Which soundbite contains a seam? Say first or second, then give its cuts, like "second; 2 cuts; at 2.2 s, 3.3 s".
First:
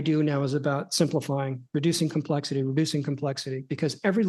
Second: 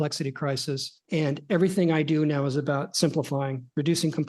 second; 1 cut; at 0.9 s